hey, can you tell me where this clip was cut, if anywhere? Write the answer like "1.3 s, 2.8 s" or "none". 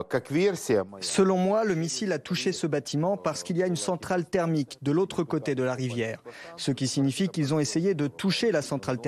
0.9 s

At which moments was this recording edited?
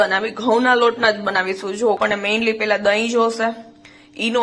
2.0 s

